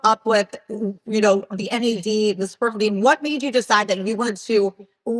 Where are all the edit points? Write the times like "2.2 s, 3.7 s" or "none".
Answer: none